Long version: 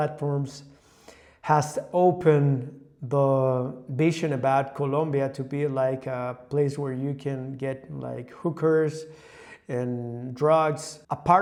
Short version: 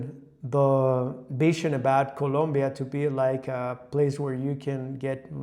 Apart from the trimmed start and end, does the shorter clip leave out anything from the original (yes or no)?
no